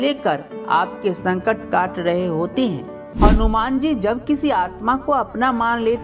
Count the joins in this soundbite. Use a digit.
1